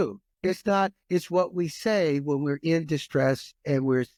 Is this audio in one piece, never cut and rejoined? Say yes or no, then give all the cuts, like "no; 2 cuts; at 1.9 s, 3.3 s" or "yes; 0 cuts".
yes; 0 cuts